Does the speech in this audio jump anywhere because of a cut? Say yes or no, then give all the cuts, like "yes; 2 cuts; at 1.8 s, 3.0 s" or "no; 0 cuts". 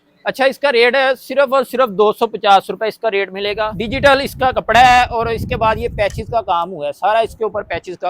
yes; 1 cut; at 3.7 s